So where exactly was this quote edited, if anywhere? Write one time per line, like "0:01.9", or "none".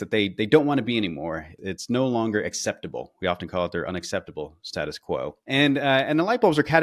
0:01.5